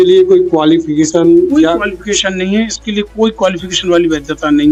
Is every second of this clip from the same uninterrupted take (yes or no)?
yes